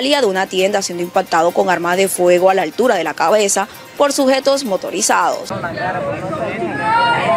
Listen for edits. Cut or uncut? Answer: uncut